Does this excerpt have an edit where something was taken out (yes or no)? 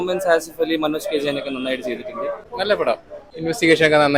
yes